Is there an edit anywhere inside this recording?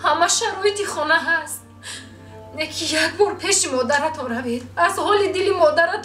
no; 0 cuts

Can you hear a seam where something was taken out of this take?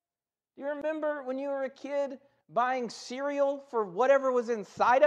yes; 1 cut; at 3.0 s

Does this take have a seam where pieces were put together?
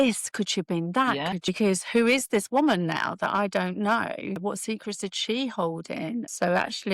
yes; 1 cut; at 1.4 s

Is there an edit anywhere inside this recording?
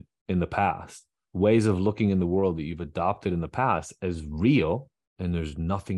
yes; 1 cut; at 5.0 s

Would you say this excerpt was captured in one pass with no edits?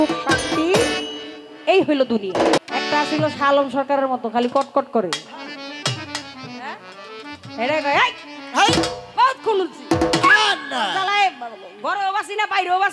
no; 1 cut; at 2.6 s

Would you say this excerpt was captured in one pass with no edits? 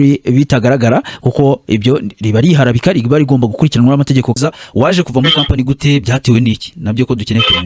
no; 1 cut; at 4.4 s

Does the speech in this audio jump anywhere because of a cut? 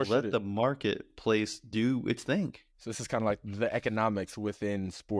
no; 0 cuts

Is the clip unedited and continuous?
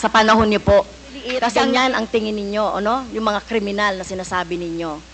no; 1 cut; at 1.5 s

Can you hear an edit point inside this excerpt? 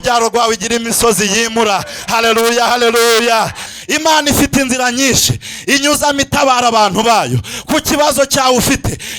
yes; 1 cut; at 3.6 s

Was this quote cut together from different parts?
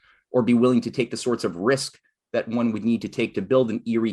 no; 0 cuts

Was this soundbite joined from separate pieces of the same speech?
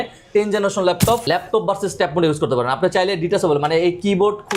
yes; 1 cut; at 1.2 s

